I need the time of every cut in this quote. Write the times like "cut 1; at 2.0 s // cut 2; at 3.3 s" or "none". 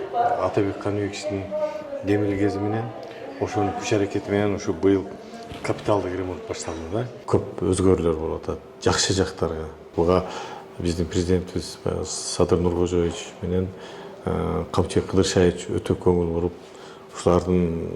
cut 1; at 7.2 s // cut 2; at 9.9 s